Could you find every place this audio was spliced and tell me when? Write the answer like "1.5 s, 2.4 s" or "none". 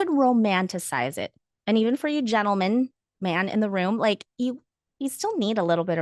none

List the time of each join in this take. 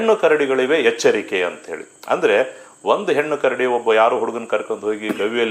none

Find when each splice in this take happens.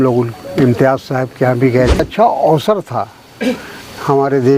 2.0 s

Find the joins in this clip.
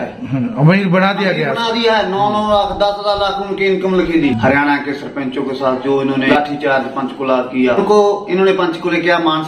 4.4 s, 6.3 s, 7.8 s

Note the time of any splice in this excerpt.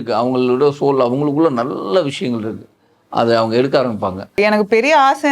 4.4 s

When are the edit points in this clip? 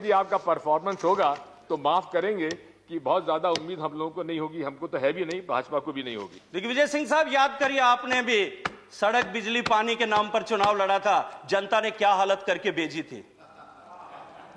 6.3 s

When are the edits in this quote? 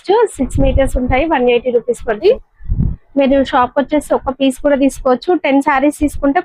2.2 s

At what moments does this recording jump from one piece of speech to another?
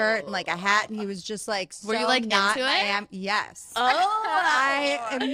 none

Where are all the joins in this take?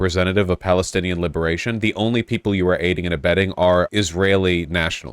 3.9 s

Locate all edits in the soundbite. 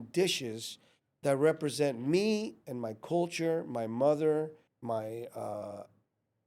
4.7 s

